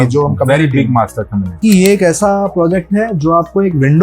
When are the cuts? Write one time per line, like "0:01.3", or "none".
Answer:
0:01.6

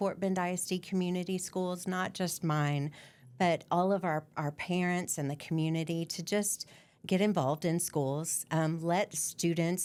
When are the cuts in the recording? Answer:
none

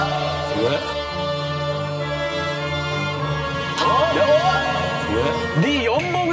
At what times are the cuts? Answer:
0:05.4

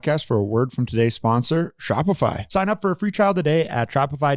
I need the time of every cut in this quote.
0:02.4

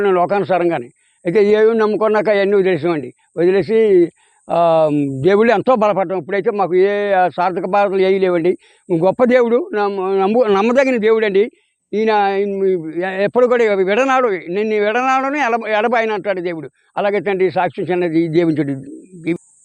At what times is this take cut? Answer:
none

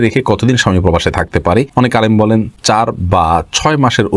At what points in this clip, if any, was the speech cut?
0:01.7
0:02.5

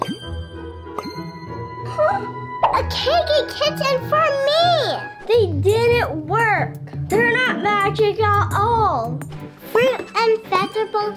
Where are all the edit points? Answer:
none

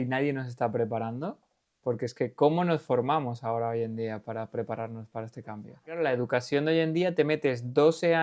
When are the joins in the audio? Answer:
0:06.0

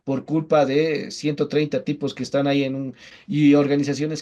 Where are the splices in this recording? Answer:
0:03.1

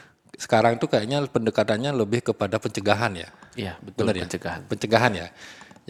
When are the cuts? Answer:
none

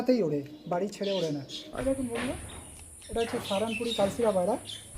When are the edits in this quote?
0:01.6

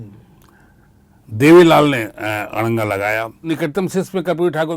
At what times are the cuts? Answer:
0:03.5

